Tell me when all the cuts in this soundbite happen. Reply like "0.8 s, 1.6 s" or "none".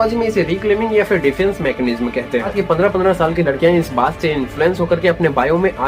2.5 s